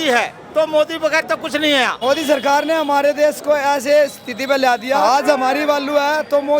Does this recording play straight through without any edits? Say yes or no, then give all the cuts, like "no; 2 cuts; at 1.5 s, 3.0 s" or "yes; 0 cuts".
no; 2 cuts; at 1.9 s, 5.0 s